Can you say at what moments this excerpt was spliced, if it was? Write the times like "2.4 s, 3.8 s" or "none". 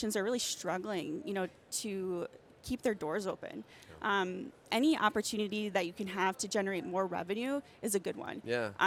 none